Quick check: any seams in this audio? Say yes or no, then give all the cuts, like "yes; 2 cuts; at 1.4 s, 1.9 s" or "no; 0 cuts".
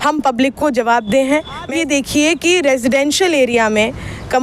yes; 1 cut; at 1.7 s